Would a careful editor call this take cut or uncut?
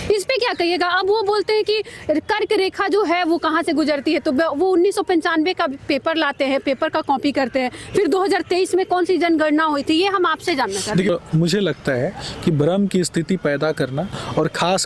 cut